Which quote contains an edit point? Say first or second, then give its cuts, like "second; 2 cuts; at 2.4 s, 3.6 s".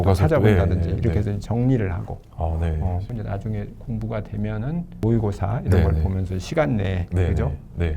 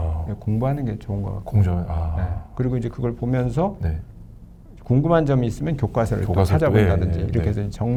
first; 2 cuts; at 3.1 s, 5.0 s